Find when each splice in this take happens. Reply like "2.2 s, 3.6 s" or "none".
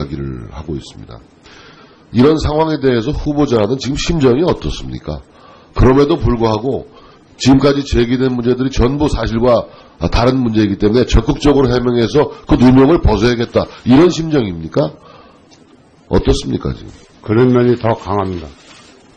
12.9 s